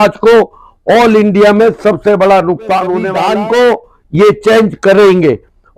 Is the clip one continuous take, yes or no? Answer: no